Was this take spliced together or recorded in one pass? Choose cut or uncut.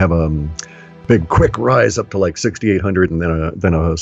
cut